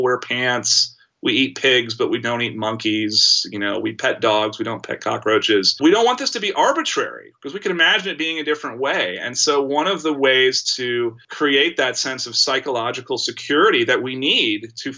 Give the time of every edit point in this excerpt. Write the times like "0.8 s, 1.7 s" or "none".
none

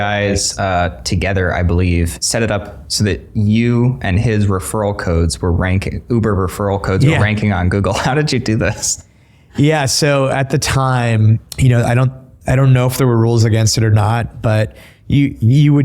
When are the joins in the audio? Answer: 2.2 s, 11.5 s

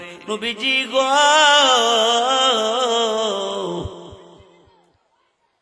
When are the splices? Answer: none

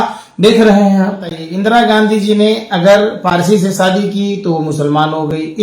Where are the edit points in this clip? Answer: 1.5 s

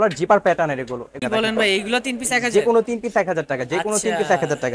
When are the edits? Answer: 1.2 s

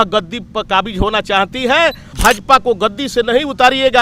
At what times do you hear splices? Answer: 2.1 s

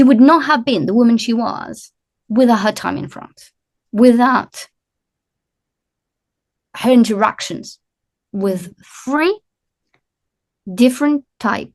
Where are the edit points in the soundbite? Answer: none

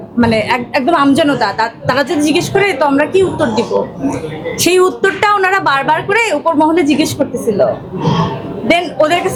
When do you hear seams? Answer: none

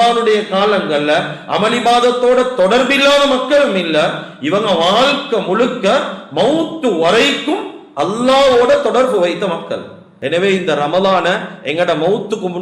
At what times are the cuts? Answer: 10.1 s

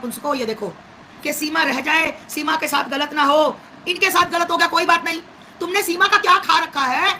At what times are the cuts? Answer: 1.1 s

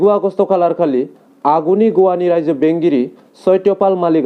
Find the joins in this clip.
none

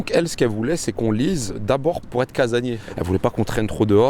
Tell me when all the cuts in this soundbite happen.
2.0 s

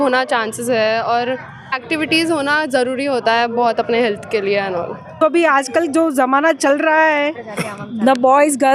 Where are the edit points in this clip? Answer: 1.6 s, 5.2 s

